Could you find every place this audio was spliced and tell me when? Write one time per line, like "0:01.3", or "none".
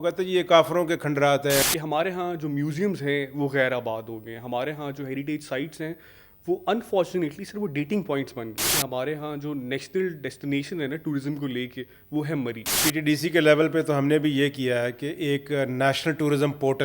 0:01.6
0:08.7
0:12.8